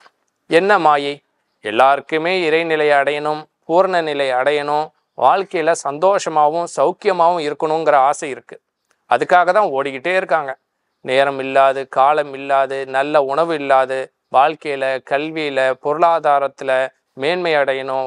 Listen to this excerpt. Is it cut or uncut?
uncut